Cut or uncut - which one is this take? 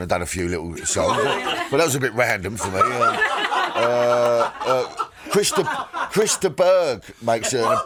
uncut